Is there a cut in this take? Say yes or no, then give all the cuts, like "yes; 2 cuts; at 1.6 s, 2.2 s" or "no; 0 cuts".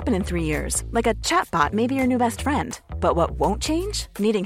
no; 0 cuts